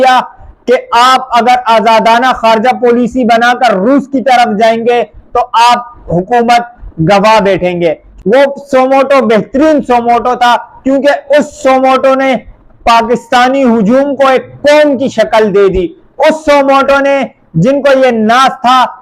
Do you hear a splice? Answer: yes; 1 cut; at 8.1 s

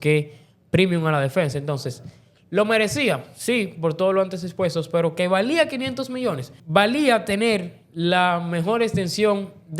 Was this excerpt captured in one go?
no; 1 cut; at 6.6 s

